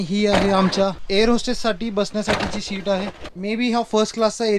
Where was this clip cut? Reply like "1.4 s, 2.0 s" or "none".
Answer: 3.4 s